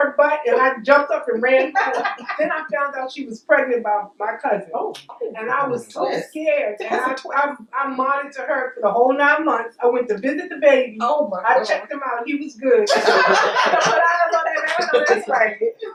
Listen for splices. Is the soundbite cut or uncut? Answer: uncut